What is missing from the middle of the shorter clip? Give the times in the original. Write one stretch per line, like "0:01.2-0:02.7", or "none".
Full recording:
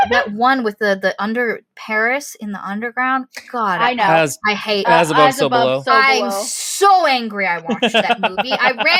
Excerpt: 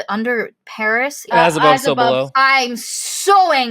0:02.4-0:04.8